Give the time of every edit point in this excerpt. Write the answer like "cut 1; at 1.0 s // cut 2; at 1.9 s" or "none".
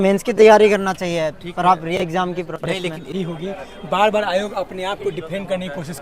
cut 1; at 3.1 s